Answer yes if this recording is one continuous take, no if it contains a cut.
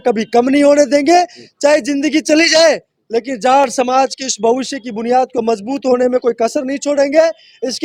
yes